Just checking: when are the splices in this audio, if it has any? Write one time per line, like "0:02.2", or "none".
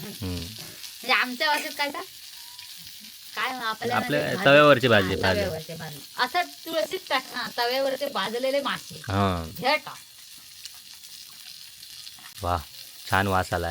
0:12.3